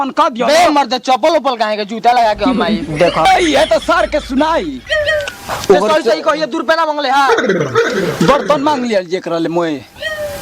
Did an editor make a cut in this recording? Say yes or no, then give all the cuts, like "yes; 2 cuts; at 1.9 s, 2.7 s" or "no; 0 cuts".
yes; 1 cut; at 3.3 s